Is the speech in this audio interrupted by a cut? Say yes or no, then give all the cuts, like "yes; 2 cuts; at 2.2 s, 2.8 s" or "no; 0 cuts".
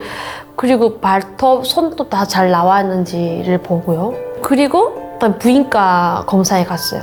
no; 0 cuts